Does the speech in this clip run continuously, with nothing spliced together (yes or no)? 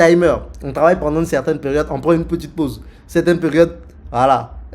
yes